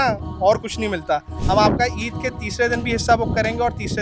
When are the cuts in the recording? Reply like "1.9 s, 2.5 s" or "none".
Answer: 1.4 s